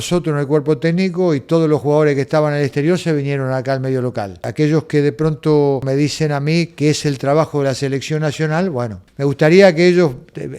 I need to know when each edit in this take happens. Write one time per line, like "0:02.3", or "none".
0:04.5
0:05.8
0:09.0

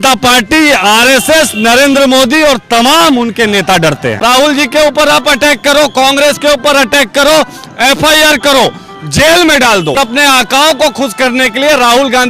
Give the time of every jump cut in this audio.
0:04.2
0:10.0

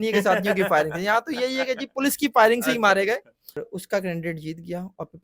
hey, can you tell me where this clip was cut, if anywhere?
0:03.6

